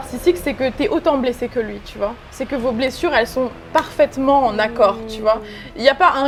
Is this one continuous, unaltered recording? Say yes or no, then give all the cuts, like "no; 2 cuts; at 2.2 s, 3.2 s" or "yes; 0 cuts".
yes; 0 cuts